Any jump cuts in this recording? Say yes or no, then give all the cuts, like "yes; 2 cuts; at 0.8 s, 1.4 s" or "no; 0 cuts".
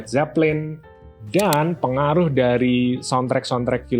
no; 0 cuts